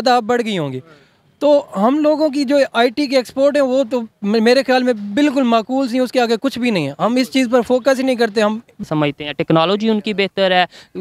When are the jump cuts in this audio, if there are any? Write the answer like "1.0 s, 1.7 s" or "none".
8.8 s